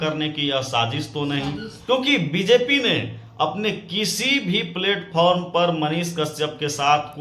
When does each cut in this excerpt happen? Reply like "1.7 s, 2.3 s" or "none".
1.8 s